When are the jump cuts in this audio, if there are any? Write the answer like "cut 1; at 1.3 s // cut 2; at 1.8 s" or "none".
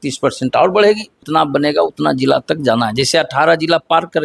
cut 1; at 1.2 s